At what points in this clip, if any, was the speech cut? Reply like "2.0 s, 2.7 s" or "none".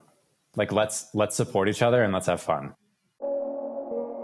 3.1 s